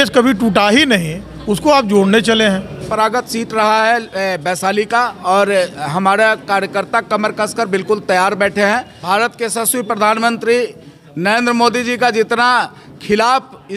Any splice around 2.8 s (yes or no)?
yes